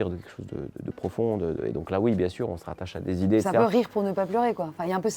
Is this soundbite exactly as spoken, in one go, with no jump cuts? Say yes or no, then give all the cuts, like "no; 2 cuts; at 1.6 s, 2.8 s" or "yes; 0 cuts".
yes; 0 cuts